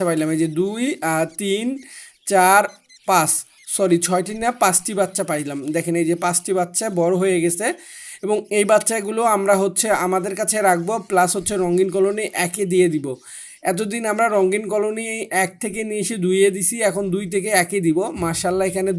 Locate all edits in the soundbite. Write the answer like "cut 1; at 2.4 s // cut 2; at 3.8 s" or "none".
none